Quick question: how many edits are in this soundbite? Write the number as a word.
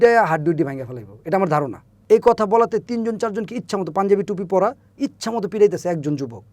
one